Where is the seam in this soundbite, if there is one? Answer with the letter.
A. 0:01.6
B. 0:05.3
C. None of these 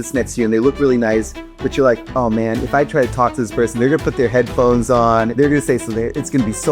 B